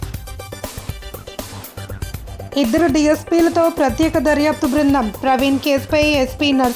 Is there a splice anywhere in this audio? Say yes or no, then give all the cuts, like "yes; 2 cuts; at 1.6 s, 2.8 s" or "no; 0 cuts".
no; 0 cuts